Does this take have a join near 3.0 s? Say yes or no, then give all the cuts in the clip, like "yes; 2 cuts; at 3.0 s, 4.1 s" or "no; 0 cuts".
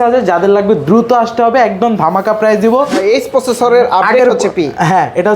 yes; 1 cut; at 3.0 s